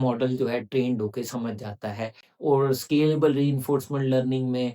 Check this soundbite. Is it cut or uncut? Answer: cut